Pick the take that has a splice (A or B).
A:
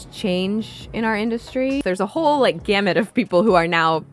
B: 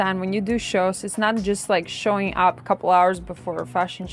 A